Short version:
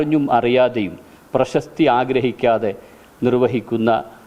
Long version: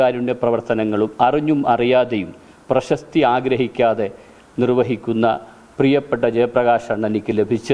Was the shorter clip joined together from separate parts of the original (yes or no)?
no